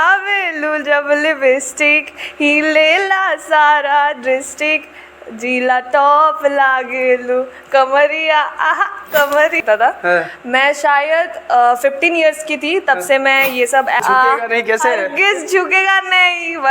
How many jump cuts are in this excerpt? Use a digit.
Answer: 2